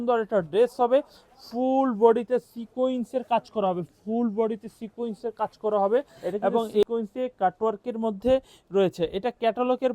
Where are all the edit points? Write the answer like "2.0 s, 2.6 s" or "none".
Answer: 6.9 s